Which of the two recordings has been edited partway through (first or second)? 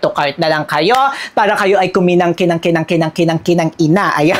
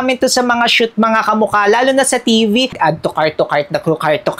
second